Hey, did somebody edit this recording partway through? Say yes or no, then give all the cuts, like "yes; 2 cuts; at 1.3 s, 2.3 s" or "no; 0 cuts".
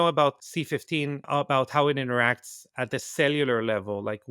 yes; 1 cut; at 1.0 s